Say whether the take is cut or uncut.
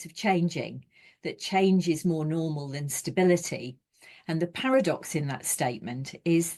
uncut